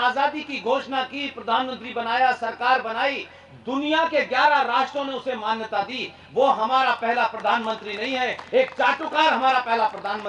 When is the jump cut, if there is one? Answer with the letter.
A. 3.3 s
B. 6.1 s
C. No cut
C